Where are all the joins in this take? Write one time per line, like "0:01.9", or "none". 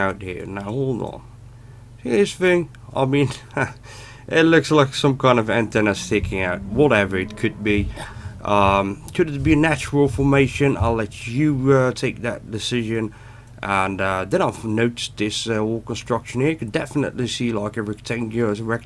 0:03.2